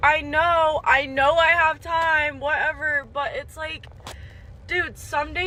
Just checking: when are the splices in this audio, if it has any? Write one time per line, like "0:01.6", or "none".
none